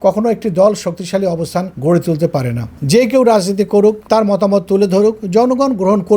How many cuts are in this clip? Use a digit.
2